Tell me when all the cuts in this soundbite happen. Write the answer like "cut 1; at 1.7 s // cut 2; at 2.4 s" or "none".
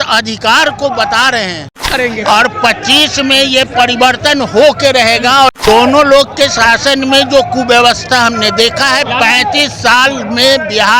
cut 1; at 1.9 s // cut 2; at 5.6 s